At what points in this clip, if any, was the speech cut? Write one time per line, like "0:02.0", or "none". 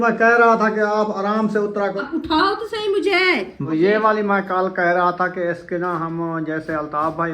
0:02.0
0:03.6